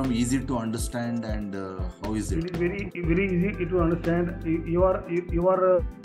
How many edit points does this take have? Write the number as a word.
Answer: zero